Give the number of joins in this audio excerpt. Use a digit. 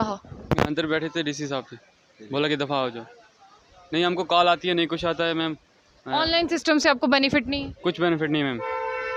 0